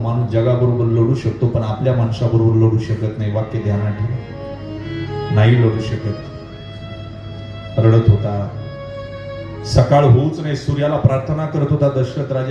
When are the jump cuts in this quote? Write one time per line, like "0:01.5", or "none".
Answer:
none